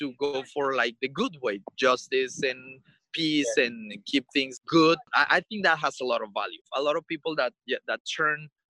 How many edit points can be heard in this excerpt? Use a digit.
3